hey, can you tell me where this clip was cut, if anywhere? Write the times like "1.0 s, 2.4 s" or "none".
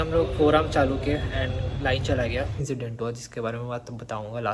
2.6 s